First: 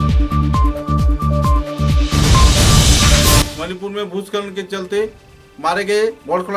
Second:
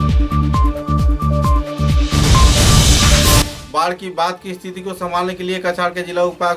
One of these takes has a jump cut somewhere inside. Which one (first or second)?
first